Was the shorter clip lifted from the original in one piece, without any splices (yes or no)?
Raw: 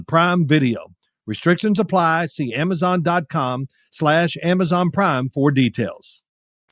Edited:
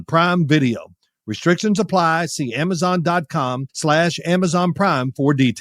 no